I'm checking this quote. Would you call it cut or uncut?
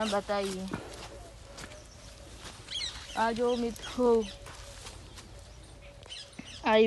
uncut